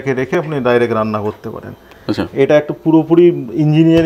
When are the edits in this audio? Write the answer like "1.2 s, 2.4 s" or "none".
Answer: none